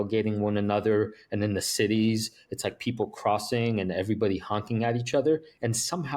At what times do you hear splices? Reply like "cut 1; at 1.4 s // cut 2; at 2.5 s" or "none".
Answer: none